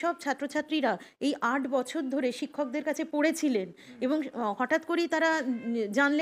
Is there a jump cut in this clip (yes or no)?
no